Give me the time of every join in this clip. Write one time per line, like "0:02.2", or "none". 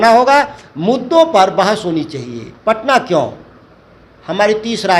0:02.5

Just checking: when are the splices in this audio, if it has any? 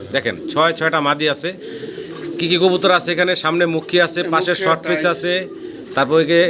none

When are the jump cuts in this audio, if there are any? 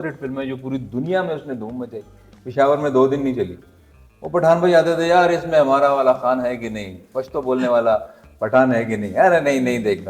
none

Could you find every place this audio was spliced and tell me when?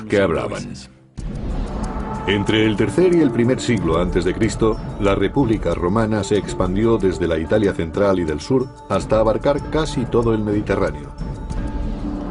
0:11.3

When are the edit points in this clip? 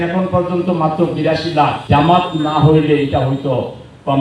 0:01.8

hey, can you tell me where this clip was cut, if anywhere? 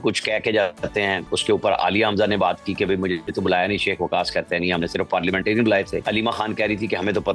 0:01.3
0:03.3
0:06.0

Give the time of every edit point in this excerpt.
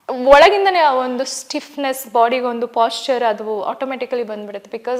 none

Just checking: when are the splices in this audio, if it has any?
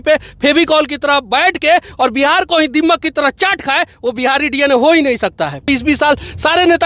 0:05.7

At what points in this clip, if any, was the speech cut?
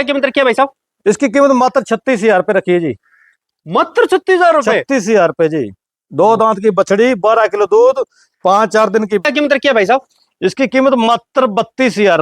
0:09.2

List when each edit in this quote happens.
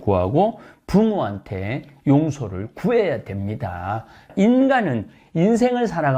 0:04.3

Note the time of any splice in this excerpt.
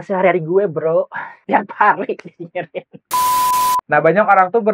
0:03.2

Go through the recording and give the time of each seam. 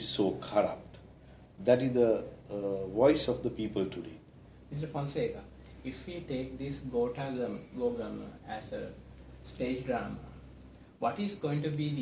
none

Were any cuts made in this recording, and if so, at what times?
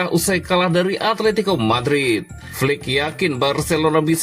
0:02.4

